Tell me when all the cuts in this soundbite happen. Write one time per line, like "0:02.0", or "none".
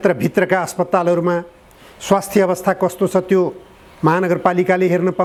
none